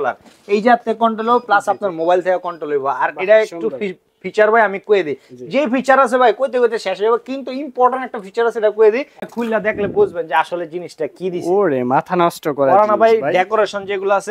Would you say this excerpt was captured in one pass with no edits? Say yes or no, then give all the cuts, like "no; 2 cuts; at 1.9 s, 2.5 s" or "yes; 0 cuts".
no; 1 cut; at 9.2 s